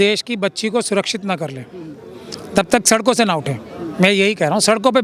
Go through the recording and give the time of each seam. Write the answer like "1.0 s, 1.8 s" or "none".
none